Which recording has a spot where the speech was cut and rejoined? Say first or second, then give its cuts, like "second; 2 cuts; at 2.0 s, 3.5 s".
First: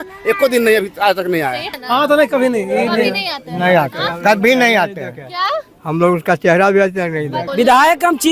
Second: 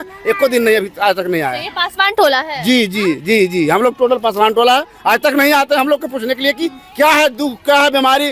first; 2 cuts; at 1.8 s, 7.4 s